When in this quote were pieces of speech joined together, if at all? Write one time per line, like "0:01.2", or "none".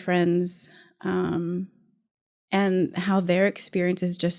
none